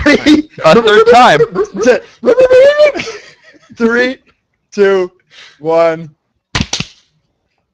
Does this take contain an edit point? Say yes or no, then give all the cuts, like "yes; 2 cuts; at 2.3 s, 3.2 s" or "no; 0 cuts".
no; 0 cuts